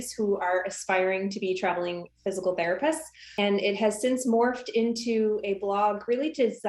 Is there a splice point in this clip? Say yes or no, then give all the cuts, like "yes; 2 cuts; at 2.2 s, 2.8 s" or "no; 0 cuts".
yes; 1 cut; at 3.3 s